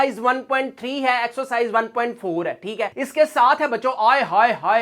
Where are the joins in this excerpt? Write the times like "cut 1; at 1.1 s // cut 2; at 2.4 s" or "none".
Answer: none